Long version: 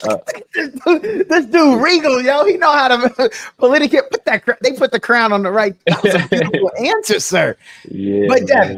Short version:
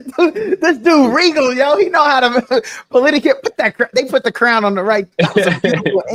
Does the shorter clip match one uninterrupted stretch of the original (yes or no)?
yes